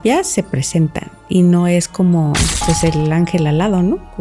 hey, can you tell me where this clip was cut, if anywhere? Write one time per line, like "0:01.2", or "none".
0:02.5